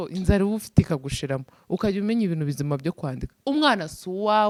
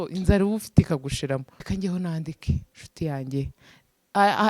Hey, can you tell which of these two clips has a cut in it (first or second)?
second